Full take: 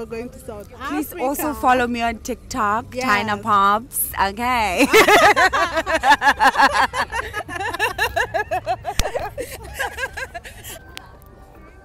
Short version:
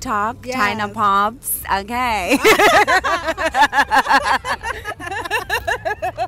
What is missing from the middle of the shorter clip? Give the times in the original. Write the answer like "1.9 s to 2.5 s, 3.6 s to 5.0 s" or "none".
none